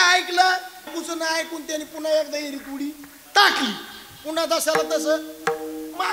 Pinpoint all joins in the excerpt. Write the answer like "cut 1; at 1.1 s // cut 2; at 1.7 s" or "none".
cut 1; at 0.9 s

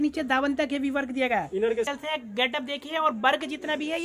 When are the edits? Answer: cut 1; at 1.9 s

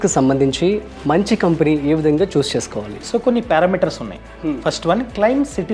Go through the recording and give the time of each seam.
none

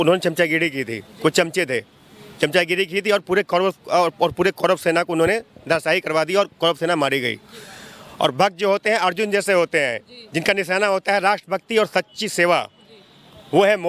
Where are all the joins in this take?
none

